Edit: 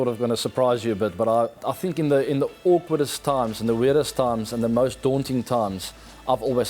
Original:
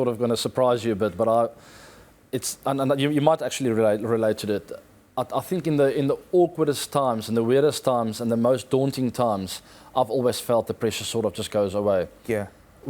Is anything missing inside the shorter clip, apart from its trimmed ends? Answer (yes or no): yes